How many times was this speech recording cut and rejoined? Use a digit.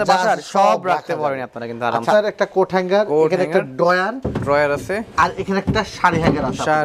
1